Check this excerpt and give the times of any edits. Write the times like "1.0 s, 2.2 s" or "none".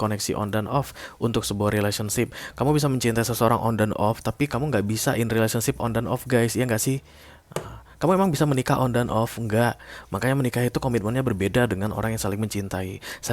none